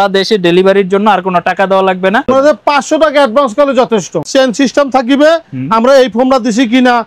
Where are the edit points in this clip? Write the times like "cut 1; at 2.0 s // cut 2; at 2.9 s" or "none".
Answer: cut 1; at 2.3 s // cut 2; at 4.3 s